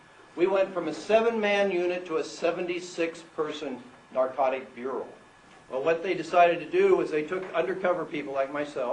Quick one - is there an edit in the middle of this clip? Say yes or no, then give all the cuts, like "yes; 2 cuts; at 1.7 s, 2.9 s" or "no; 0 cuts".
yes; 1 cut; at 3.0 s